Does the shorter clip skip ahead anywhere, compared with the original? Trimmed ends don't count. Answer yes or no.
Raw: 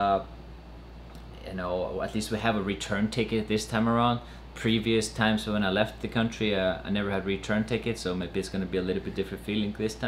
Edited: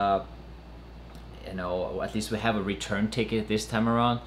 no